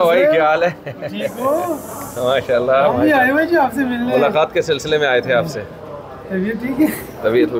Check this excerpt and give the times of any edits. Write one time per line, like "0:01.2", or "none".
none